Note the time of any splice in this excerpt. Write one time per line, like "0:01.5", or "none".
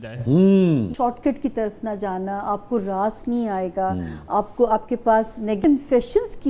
0:00.9
0:05.6